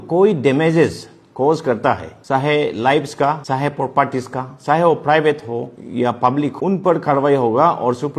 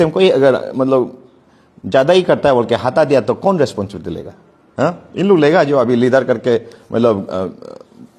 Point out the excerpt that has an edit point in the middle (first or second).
first